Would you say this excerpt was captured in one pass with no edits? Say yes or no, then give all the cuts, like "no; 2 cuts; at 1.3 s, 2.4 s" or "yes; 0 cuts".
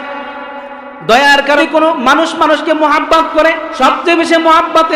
no; 2 cuts; at 1.6 s, 3.7 s